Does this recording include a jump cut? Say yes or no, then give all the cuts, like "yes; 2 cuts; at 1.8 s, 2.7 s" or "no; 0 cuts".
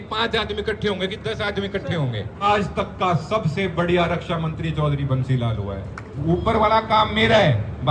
yes; 2 cuts; at 2.5 s, 6.2 s